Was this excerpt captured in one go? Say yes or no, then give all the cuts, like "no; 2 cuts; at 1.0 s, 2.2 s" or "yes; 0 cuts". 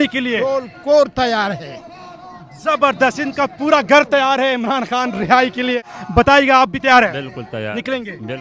no; 1 cut; at 5.9 s